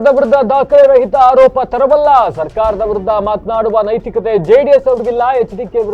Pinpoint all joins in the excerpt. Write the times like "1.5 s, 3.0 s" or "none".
none